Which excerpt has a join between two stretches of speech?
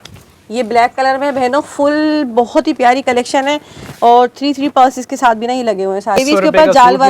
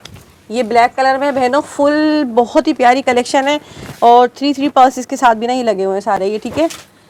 first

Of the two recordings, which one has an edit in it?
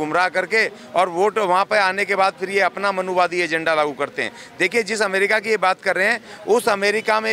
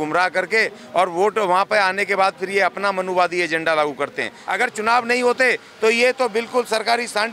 second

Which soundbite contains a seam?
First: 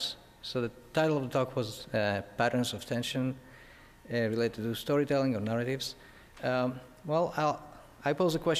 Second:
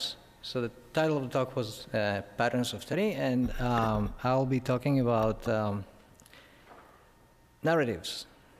first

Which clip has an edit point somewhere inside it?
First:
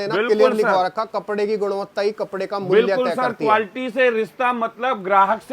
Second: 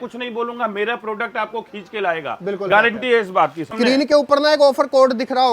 second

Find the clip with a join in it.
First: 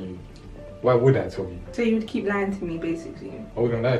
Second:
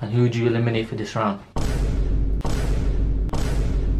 first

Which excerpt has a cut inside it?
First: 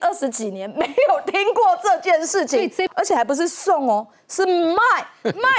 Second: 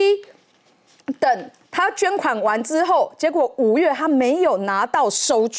first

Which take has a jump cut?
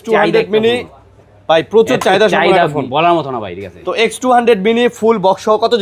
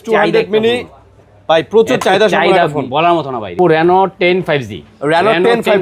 second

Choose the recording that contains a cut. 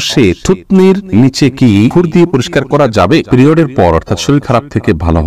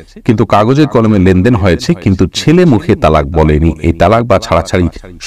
first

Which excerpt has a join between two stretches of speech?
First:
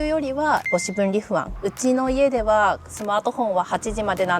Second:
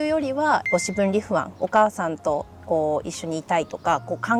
first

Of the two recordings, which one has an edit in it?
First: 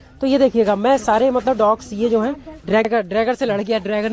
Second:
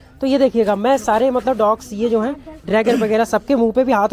first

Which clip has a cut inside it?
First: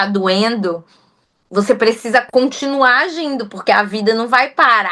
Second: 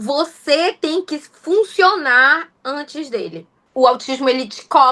second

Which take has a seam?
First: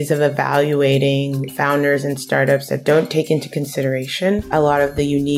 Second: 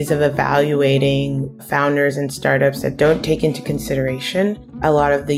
first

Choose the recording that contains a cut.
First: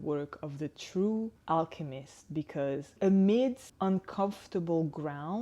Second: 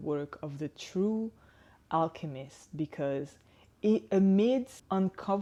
first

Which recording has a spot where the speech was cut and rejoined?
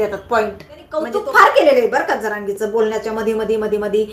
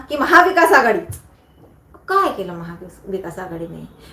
first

